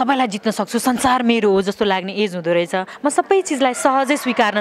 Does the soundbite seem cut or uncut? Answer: cut